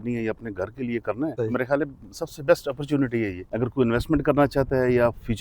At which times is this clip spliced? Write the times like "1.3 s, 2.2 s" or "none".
1.3 s, 3.4 s